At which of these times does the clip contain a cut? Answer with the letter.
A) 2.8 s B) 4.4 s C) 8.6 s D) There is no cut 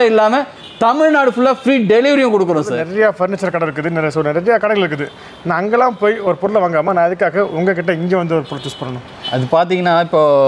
A